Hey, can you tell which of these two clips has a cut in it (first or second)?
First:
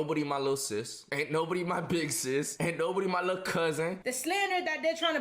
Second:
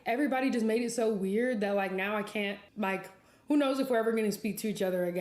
first